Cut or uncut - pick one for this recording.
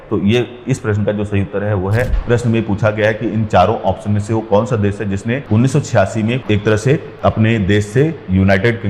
cut